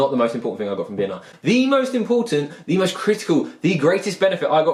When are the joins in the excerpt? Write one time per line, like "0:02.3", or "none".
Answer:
none